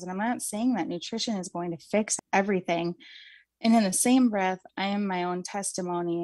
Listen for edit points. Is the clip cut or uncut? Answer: cut